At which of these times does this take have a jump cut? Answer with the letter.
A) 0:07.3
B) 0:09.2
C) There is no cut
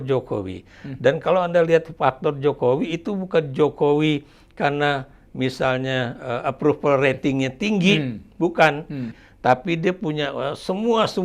B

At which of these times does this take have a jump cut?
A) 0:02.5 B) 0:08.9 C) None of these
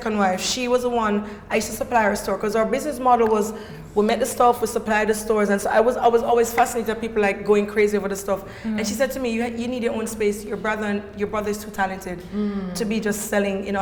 C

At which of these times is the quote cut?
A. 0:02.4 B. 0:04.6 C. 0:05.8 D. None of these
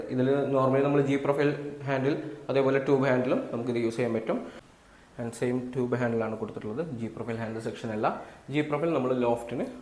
B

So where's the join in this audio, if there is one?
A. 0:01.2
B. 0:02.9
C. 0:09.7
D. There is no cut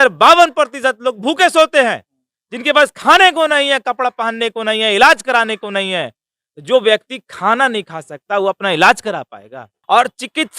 C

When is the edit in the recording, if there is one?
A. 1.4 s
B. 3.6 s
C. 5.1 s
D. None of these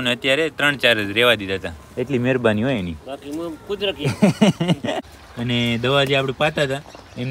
C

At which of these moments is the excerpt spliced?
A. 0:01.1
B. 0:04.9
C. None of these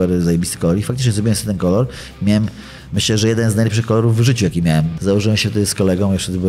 B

